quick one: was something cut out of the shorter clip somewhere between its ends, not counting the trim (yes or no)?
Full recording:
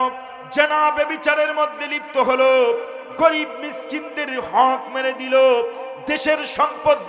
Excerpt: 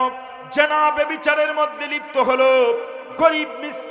no